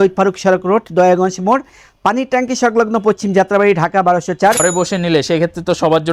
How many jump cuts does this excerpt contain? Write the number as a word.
one